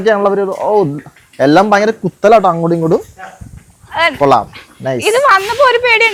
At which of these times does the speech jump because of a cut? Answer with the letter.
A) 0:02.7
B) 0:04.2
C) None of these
C